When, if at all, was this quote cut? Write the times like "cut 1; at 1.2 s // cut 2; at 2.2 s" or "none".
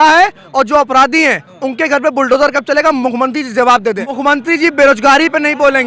cut 1; at 4.1 s